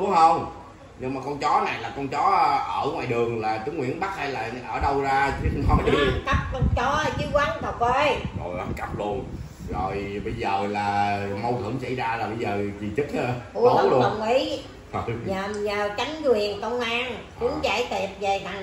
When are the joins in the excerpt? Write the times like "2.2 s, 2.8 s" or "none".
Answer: none

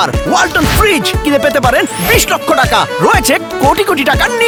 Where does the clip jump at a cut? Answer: none

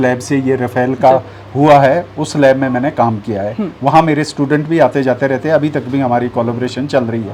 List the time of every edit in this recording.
none

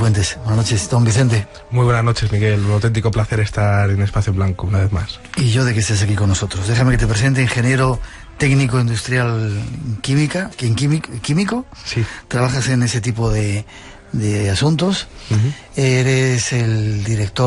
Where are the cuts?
9.3 s

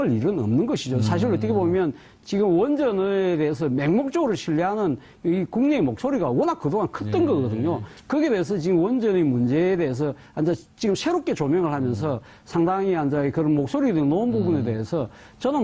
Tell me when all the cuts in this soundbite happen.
10.6 s

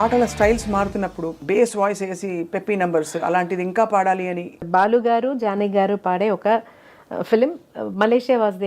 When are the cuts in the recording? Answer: 1.3 s, 4.7 s

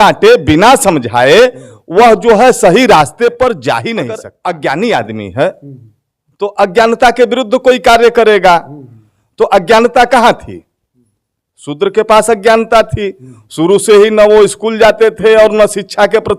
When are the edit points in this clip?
4.2 s

